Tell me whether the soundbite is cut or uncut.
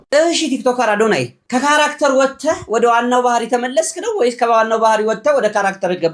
uncut